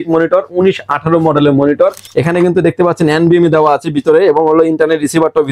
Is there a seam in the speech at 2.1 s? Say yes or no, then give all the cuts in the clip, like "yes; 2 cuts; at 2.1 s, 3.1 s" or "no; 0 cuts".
yes; 1 cut; at 2.1 s